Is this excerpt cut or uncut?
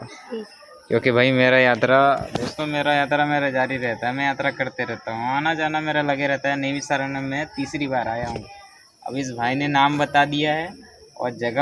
uncut